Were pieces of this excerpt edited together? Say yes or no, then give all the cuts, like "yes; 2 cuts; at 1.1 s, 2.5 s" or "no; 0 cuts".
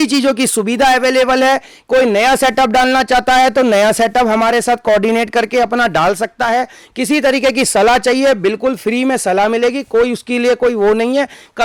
no; 0 cuts